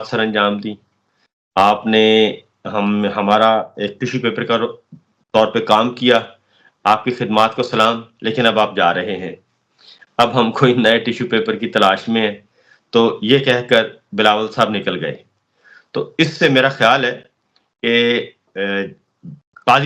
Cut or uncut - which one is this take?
uncut